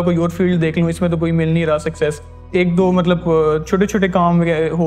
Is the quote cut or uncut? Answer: uncut